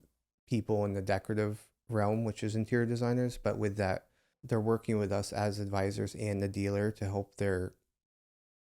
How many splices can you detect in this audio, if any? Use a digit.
1